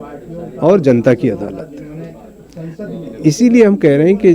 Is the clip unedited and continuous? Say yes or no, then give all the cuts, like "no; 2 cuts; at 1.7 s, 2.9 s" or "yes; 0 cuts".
yes; 0 cuts